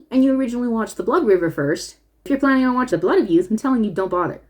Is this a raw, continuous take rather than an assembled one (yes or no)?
no